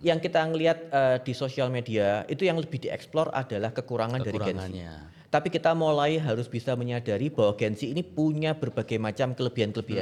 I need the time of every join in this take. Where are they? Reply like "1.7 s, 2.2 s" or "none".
none